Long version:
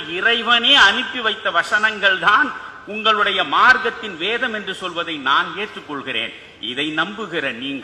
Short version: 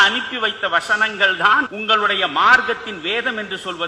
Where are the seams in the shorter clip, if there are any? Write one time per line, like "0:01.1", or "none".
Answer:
0:01.7